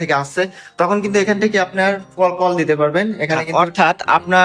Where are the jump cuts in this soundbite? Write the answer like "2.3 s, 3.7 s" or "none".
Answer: 3.4 s